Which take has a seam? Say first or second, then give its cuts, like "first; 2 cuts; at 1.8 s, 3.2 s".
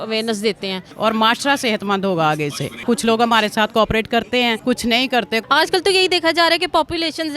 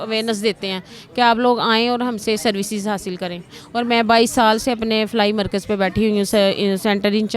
first; 4 cuts; at 0.9 s, 2.8 s, 4.6 s, 5.4 s